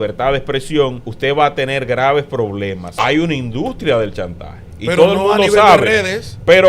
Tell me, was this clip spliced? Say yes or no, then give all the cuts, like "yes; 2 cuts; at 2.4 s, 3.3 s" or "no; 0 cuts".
yes; 2 cuts; at 1.1 s, 2.8 s